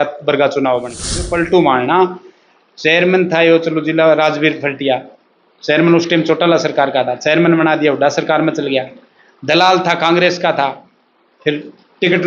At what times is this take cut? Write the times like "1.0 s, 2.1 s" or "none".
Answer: 1.2 s